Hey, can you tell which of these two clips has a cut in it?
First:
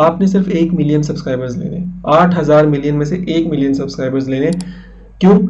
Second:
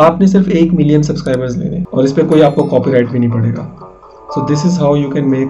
second; 1 cut; at 1.8 s

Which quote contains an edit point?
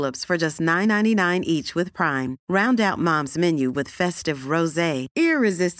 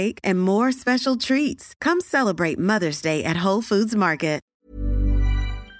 second; 1 cut; at 4.5 s

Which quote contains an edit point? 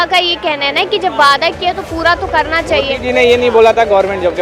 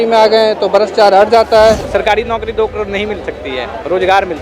second; 1 cut; at 1.9 s

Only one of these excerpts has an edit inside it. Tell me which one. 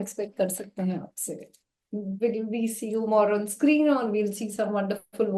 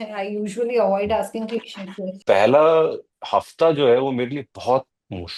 second; 1 cut; at 2.1 s

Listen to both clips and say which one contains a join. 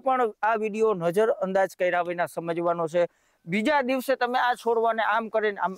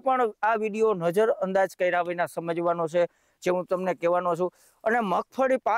first; 1 cut; at 3.3 s

